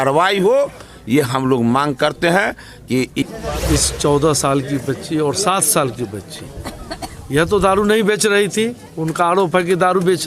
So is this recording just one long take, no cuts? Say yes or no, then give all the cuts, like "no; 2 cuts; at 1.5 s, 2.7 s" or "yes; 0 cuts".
no; 1 cut; at 3.2 s